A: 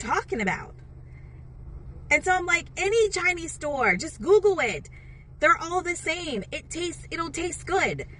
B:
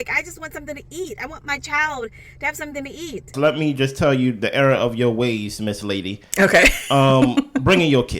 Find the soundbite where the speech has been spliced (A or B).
B